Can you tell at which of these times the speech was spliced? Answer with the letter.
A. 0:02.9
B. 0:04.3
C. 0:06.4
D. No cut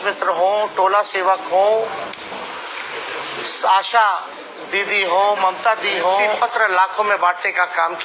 C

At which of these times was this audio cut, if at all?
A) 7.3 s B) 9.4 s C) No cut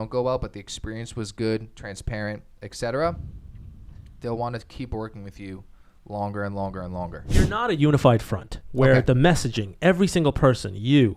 A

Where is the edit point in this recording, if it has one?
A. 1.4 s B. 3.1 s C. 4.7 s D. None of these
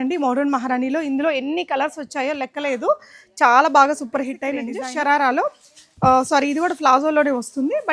C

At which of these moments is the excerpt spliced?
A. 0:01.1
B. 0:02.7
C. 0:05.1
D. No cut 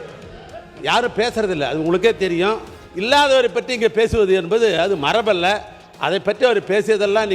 B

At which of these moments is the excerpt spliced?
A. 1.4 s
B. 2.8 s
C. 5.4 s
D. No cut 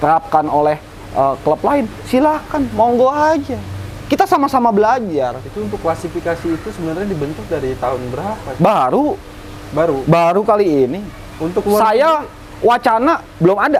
D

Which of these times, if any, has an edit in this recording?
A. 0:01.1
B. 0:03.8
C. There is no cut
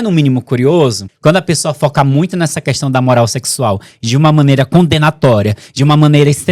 A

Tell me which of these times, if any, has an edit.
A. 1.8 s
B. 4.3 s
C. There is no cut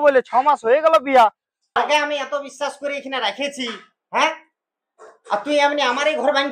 A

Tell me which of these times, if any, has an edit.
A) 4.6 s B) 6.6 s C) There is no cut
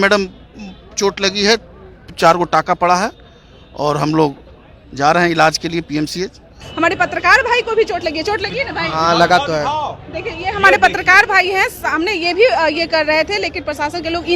B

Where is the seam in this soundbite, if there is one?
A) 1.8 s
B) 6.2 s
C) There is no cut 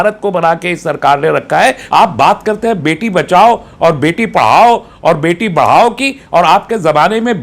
A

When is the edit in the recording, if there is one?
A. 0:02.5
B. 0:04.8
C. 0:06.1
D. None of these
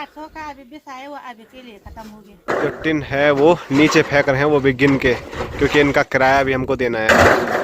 A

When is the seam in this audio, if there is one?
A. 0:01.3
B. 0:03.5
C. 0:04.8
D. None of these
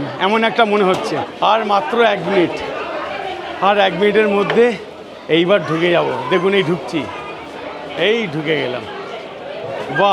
A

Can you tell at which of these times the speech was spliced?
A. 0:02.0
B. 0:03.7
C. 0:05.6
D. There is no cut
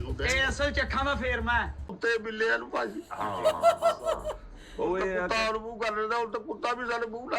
A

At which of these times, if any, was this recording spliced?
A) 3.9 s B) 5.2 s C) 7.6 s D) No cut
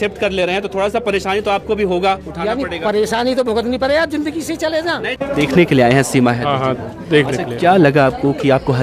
B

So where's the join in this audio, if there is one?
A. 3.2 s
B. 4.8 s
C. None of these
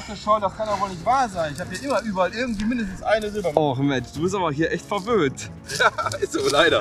C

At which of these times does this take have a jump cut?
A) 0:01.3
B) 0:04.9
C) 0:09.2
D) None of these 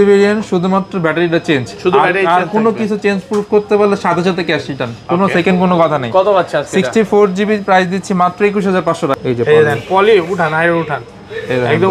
C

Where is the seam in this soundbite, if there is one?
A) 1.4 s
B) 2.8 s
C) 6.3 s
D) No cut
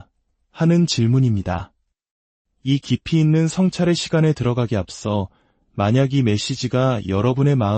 D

